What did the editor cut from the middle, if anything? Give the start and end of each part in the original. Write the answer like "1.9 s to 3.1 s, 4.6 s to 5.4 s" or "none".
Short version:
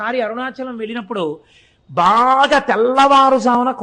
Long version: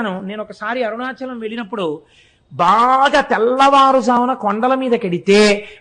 none

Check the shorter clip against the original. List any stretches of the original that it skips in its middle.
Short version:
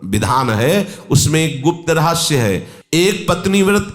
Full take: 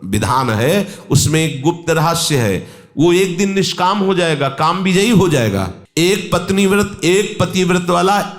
2.8 s to 5.8 s

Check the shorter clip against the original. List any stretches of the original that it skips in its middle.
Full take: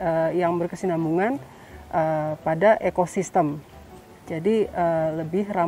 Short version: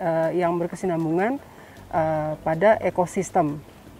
none

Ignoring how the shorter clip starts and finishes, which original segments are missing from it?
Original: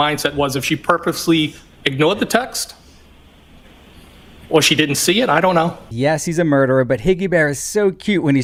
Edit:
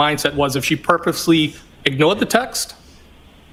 none

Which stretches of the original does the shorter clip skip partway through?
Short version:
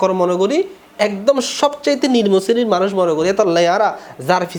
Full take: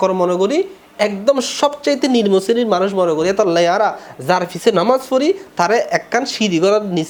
none

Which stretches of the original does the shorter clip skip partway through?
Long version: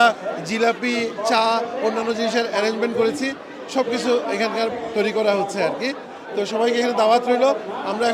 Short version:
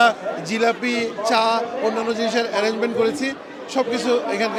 none

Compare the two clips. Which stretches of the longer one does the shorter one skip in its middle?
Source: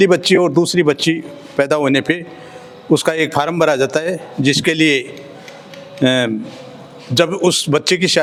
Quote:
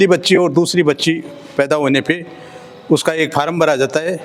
none

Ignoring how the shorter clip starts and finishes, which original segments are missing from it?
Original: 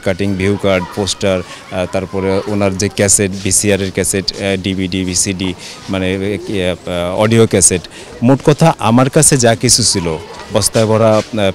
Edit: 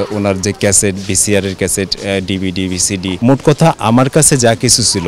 5.5 s to 8.1 s

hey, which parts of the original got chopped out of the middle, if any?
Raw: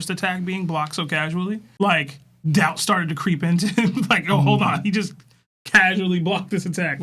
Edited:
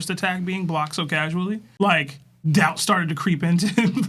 none

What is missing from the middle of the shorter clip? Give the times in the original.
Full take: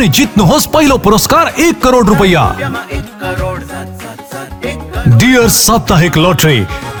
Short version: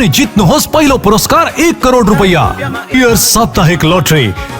2.9 s to 5.3 s

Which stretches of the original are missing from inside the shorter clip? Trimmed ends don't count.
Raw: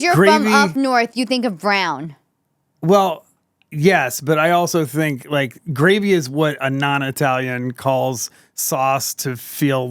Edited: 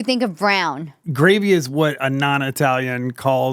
2.2 s to 5.6 s

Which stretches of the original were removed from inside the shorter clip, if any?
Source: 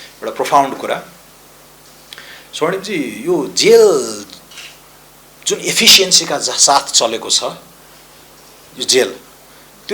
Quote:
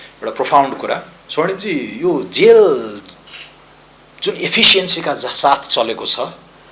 1.2 s to 2.4 s

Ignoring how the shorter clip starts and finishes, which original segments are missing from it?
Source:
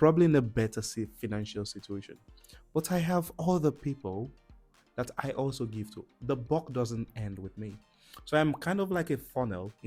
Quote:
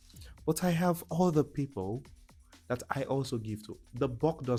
none

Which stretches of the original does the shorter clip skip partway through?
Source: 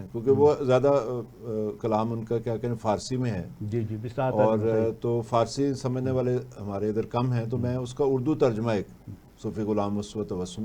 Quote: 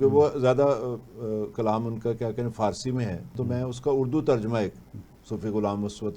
3.6 s to 7.4 s

